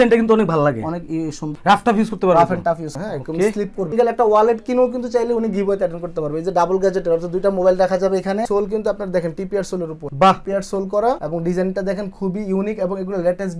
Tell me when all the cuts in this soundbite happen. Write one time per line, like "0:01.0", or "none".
0:01.5
0:03.0
0:03.9
0:08.4